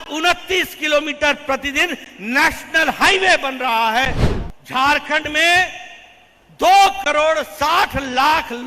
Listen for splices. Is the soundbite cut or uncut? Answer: cut